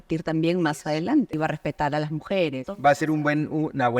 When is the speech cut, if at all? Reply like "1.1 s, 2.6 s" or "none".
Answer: 1.3 s, 2.6 s

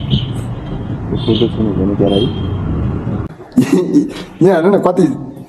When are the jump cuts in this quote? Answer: 3.3 s

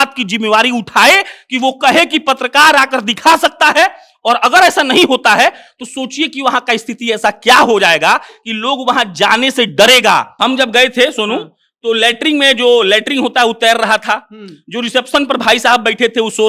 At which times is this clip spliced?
10.3 s

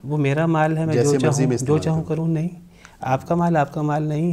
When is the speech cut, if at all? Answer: none

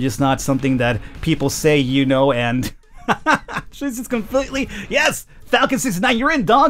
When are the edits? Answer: none

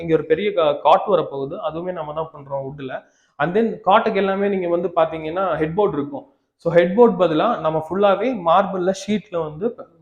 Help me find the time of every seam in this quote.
none

